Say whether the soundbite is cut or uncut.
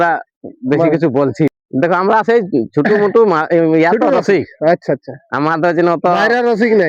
cut